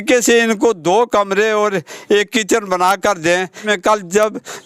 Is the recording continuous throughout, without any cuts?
no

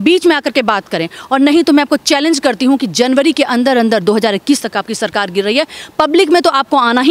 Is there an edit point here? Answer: no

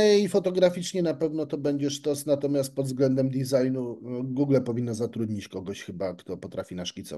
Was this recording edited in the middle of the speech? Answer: no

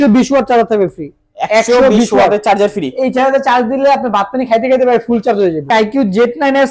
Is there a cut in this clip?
yes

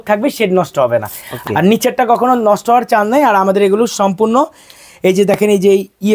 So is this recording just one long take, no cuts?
no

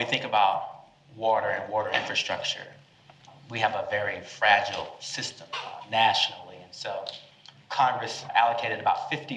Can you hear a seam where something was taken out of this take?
yes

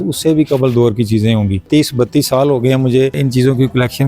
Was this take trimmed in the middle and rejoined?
yes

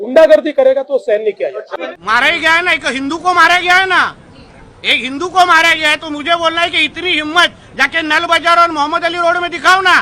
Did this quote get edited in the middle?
yes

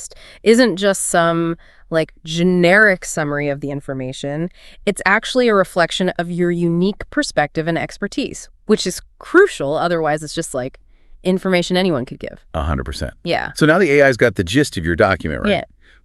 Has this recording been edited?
no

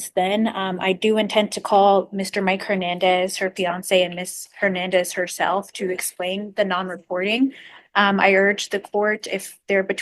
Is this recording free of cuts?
yes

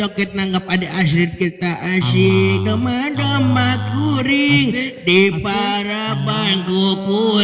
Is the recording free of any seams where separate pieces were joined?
yes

